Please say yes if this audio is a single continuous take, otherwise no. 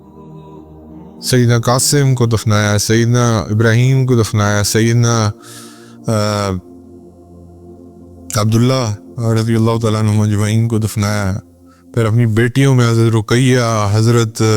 yes